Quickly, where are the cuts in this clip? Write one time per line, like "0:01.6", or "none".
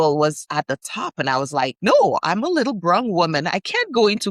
0:01.8